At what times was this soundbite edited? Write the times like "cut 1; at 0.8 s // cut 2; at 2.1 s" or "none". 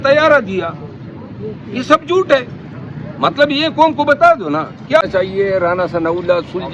cut 1; at 5.0 s